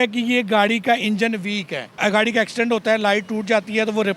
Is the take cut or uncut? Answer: cut